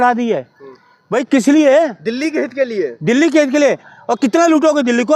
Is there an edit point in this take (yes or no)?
yes